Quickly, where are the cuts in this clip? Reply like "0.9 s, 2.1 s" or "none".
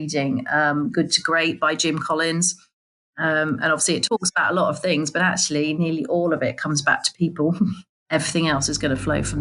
7.9 s